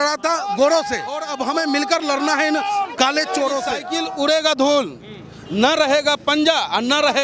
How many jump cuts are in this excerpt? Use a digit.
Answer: 2